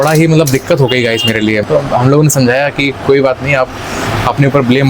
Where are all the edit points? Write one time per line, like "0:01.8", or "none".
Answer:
0:01.6